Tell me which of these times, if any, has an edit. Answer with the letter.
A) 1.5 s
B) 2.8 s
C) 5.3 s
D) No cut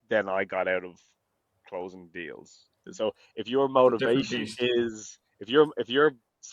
B